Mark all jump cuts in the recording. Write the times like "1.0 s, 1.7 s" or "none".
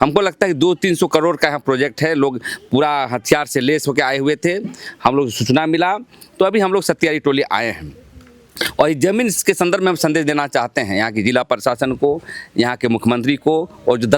none